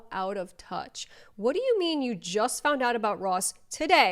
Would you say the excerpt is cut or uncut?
uncut